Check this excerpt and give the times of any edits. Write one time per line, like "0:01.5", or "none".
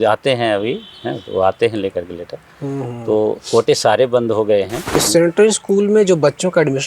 0:04.9